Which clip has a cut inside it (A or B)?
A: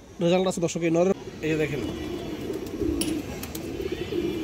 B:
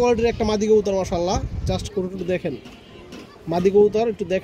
A